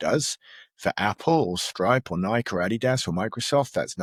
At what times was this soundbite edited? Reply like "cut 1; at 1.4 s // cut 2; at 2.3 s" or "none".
none